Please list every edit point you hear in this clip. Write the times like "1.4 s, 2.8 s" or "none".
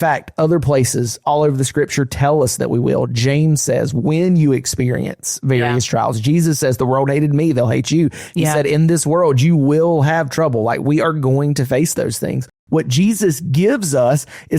12.6 s